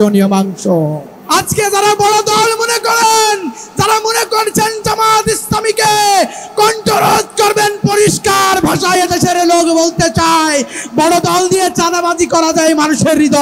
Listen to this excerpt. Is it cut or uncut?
cut